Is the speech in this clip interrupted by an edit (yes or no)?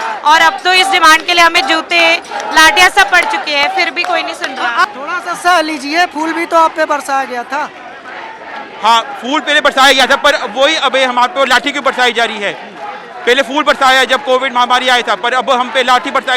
yes